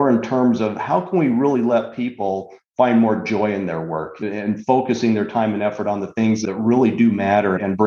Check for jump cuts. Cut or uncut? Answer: cut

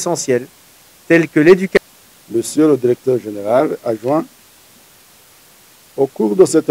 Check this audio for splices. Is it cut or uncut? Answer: cut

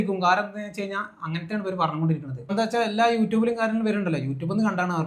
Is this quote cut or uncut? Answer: cut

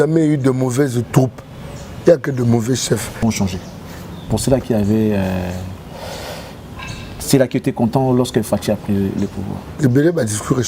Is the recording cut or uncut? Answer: cut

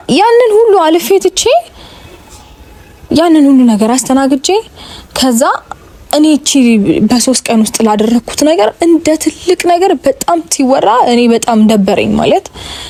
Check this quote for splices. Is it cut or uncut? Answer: uncut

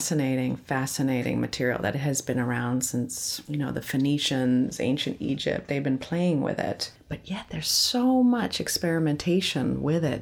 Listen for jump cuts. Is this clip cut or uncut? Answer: uncut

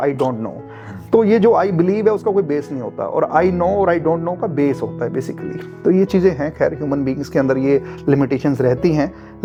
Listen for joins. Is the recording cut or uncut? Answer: uncut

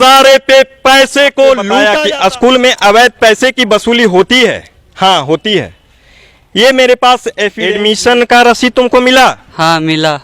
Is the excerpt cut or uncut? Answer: cut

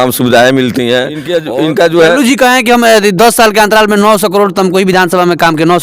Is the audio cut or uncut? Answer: cut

